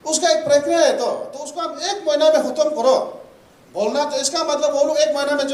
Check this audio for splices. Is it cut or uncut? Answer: uncut